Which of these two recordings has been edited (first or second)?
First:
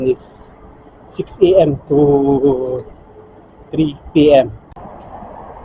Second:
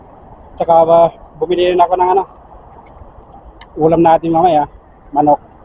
first